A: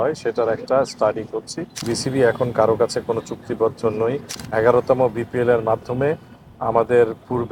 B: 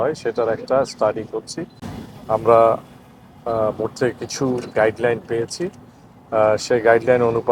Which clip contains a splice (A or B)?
A